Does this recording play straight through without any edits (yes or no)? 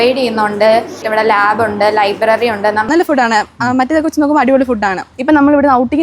no